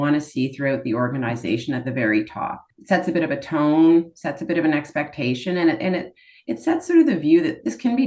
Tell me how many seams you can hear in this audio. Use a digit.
1